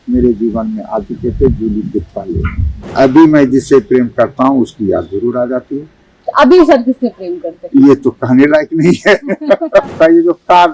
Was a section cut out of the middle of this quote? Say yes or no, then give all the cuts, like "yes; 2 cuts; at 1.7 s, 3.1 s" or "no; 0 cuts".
yes; 2 cuts; at 2.9 s, 9.9 s